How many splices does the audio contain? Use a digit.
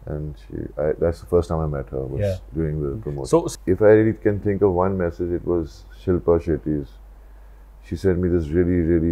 1